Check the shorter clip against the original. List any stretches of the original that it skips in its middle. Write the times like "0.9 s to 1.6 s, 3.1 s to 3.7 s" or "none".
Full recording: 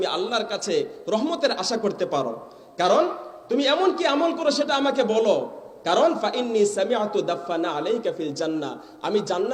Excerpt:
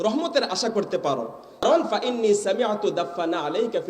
2.7 s to 5.9 s